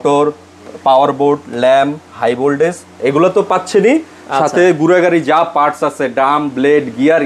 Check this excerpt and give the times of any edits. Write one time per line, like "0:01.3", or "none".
none